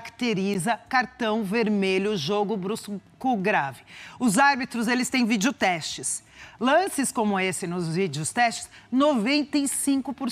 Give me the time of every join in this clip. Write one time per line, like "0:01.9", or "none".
none